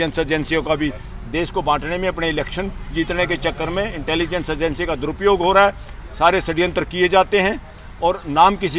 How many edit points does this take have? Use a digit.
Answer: 0